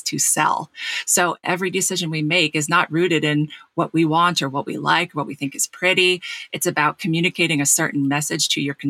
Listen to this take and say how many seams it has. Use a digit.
1